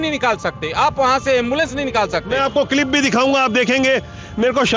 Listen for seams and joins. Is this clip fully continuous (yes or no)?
yes